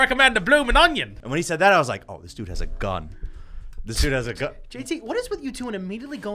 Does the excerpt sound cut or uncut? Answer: cut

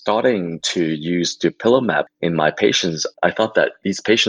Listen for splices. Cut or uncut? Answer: uncut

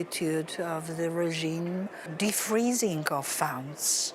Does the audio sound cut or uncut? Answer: cut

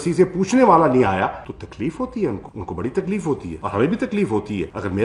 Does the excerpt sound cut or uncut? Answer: uncut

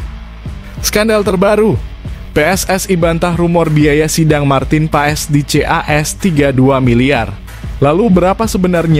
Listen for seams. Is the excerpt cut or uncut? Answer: cut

